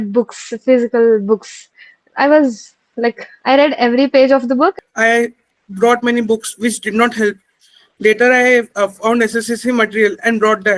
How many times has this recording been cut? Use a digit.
1